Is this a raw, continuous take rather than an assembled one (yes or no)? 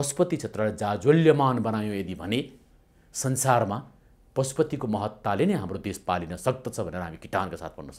yes